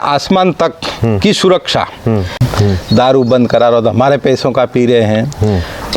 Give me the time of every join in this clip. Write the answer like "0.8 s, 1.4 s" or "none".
2.5 s